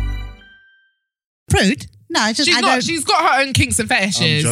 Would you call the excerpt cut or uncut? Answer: cut